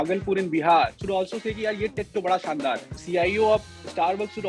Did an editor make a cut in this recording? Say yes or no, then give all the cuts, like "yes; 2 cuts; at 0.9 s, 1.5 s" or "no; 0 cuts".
yes; 2 cuts; at 1.0 s, 2.9 s